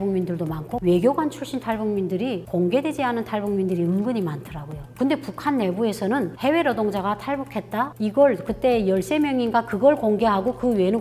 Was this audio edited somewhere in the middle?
no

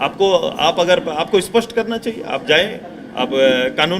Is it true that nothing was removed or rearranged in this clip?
yes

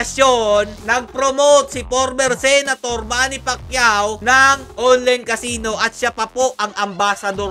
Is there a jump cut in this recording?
no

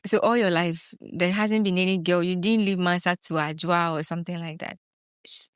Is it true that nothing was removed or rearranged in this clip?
yes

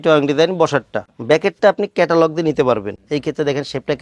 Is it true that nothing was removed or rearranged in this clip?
no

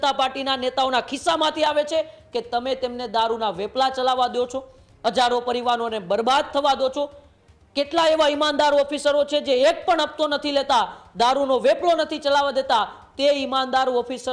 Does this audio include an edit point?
no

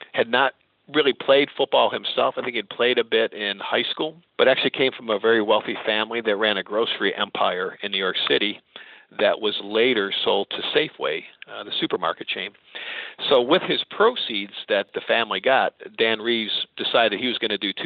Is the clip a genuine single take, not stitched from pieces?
no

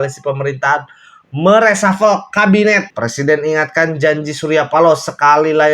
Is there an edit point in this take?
yes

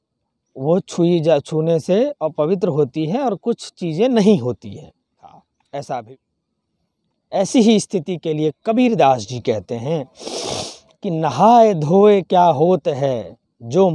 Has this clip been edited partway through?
yes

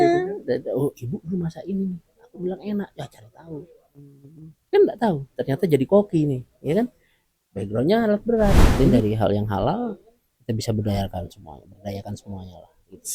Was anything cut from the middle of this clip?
yes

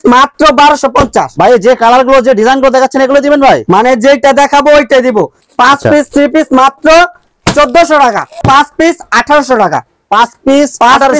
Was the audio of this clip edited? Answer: yes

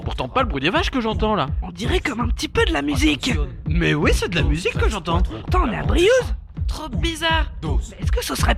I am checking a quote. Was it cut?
no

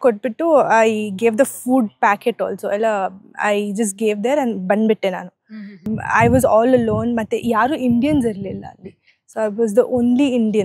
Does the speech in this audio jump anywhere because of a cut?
yes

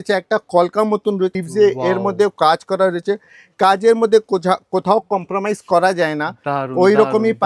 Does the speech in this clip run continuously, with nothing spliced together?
no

